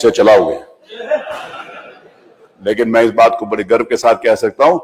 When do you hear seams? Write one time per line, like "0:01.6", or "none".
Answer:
none